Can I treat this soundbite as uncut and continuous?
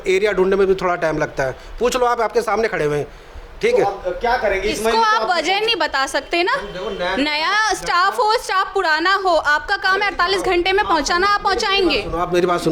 yes; 0 cuts

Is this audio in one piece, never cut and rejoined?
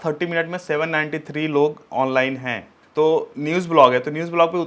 no; 1 cut; at 2.9 s

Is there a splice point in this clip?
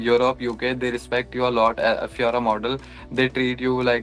no; 0 cuts

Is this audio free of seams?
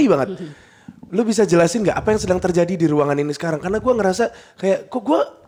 yes; 0 cuts

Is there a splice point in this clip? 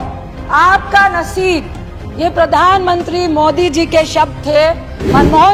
no; 0 cuts

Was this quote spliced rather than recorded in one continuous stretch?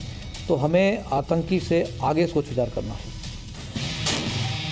yes; 1 cut; at 3.0 s

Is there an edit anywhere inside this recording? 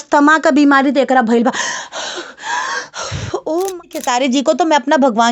yes; 1 cut; at 3.8 s

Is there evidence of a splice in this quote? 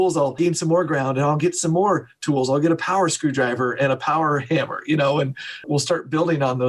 no; 0 cuts

